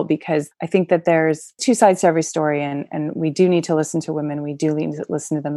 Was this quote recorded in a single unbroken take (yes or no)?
yes